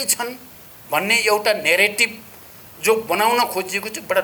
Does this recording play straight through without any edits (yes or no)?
yes